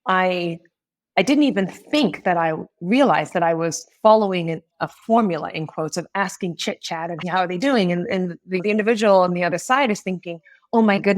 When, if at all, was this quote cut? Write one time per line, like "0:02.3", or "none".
0:07.2
0:08.6